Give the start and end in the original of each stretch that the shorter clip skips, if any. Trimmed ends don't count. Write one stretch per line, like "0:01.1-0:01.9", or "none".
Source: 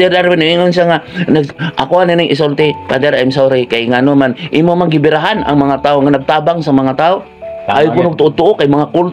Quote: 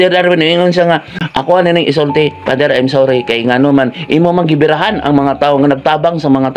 0:01.1-0:01.6

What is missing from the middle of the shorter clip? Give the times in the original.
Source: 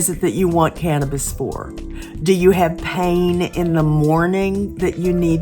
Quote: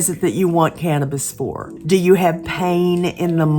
0:01.7-0:02.1

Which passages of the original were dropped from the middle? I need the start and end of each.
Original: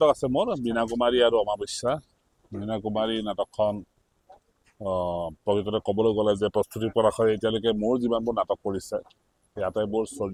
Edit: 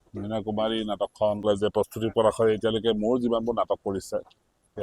0:03.8-0:06.2

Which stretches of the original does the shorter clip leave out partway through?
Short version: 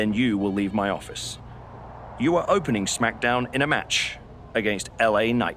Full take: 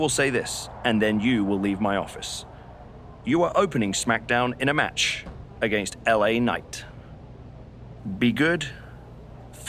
none

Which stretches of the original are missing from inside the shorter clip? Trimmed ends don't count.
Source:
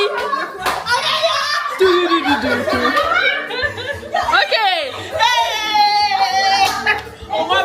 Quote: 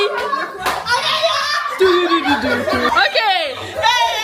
0:02.9-0:04.3

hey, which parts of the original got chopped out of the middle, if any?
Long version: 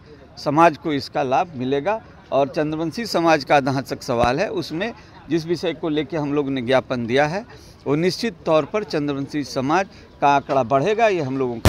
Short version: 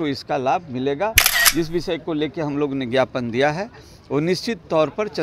0:02.1-0:05.0

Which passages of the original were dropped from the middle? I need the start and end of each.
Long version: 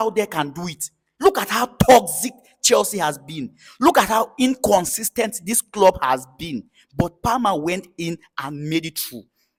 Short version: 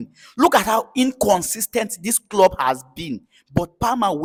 none

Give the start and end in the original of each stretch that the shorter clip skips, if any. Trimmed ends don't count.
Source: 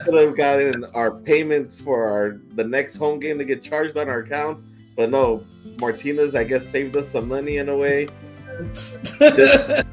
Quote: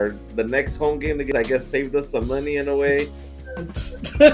0:03.5-0:06.3

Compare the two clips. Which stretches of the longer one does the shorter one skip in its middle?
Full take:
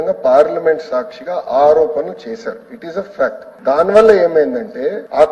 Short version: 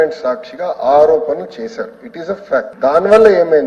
0:03.4-0:03.6

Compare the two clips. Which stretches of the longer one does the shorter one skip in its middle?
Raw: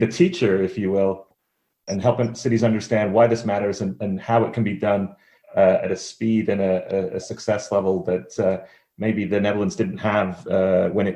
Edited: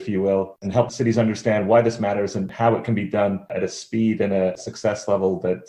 0:01.6-0:02.3
0:04.0-0:04.2
0:05.2-0:05.8
0:06.9-0:07.2

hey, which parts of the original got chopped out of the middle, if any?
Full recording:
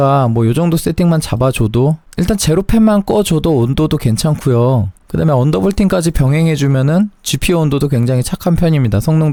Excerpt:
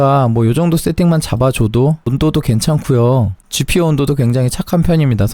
0:02.1-0:03.7
0:05.0-0:07.2

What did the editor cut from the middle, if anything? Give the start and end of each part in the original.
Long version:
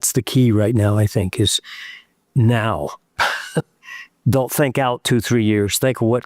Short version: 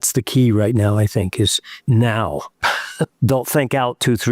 0:01.7-0:02.2
0:03.1-0:03.7

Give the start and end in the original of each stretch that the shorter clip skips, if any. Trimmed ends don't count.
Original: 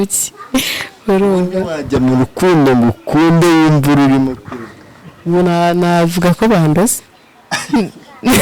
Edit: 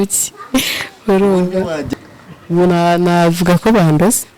0:01.8-0:04.6

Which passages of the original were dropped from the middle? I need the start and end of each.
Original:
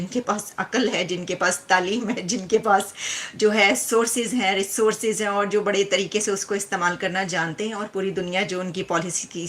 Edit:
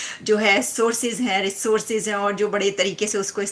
none

